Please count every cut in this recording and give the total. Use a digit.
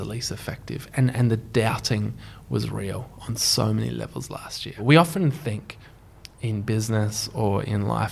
1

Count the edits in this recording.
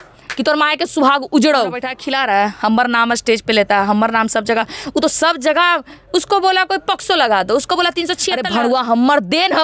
2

